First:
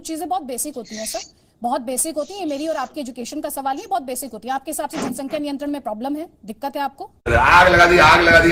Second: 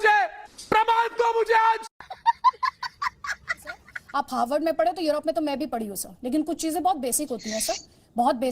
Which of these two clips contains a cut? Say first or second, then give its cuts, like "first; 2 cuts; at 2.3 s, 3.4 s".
second; 1 cut; at 3.9 s